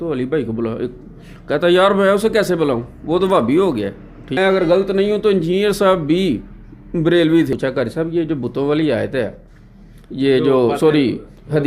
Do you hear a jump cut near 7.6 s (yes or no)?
yes